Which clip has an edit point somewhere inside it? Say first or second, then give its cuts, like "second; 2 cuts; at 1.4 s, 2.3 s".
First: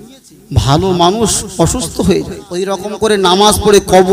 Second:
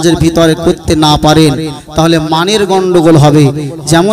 first; 1 cut; at 2.8 s